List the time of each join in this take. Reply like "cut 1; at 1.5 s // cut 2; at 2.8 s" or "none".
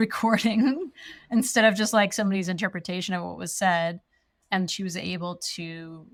none